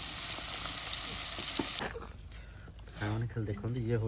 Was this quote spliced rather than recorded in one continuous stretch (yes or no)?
yes